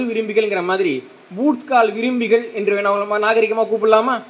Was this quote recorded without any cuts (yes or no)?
yes